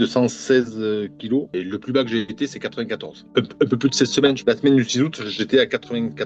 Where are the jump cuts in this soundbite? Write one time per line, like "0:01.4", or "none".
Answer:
none